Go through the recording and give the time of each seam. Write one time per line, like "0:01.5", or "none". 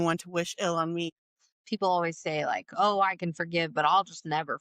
0:01.1